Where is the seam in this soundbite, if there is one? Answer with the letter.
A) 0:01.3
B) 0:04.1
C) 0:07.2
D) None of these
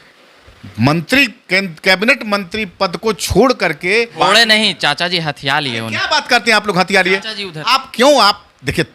B